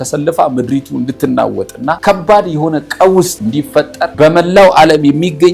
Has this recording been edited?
yes; 2 cuts; at 2.0 s, 3.6 s

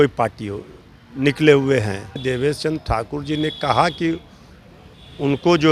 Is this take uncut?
no; 1 cut; at 2.2 s

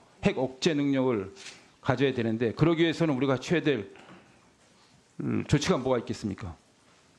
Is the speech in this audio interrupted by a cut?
no; 0 cuts

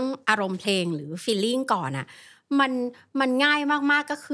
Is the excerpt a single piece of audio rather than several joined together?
yes; 0 cuts

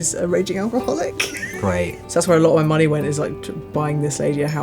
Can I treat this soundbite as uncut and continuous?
no; 1 cut; at 2.0 s

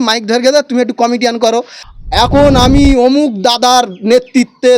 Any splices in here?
yes; 1 cut; at 2.3 s

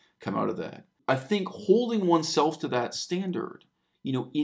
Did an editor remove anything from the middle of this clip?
yes; 1 cut; at 1.0 s

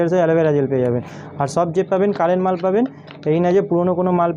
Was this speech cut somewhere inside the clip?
no; 0 cuts

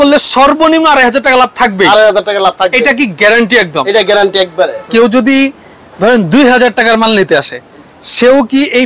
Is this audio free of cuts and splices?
no; 1 cut; at 4.8 s

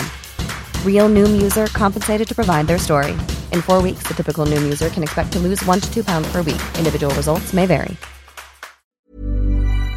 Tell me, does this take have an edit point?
yes; 1 cut; at 9.0 s

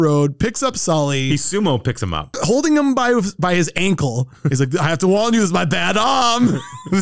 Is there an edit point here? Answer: no; 0 cuts

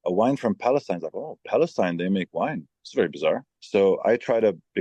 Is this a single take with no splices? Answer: no; 2 cuts; at 2.7 s, 3.5 s

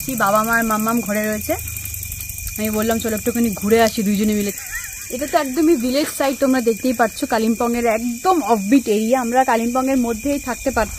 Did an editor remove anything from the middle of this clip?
no; 0 cuts

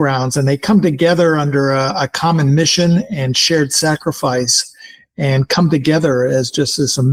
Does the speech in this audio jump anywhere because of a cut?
no; 0 cuts

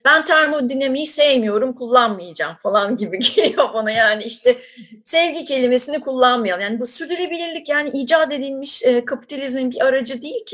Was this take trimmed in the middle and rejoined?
no; 0 cuts

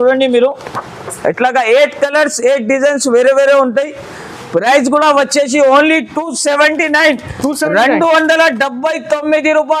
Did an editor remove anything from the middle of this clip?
no; 0 cuts

